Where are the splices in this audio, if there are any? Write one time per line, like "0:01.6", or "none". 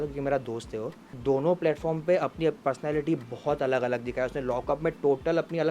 0:01.1